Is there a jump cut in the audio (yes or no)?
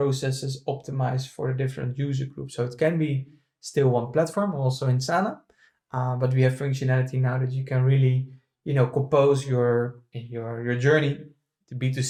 no